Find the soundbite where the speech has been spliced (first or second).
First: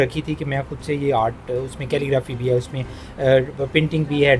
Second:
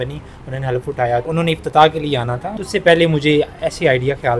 second